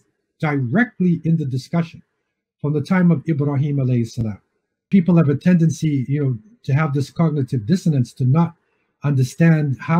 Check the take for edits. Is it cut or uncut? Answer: cut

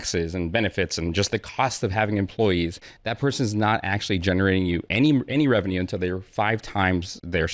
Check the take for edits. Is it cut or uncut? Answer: uncut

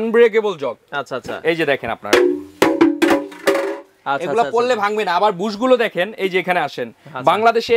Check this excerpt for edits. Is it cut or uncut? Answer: uncut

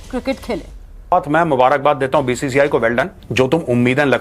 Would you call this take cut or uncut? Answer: cut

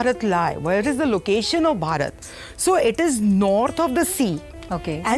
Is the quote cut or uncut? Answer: uncut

